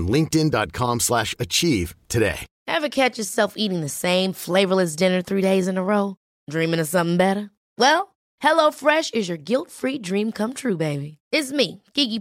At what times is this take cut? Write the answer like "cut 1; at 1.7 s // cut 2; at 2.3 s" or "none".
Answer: cut 1; at 2.5 s